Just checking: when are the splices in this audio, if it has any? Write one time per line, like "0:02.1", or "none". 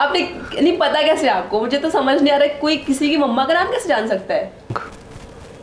0:04.7